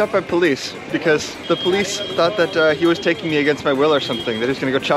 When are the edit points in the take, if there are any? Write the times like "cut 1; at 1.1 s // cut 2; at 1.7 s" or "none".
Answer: cut 1; at 1.3 s